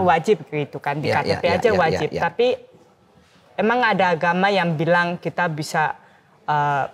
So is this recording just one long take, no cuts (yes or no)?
yes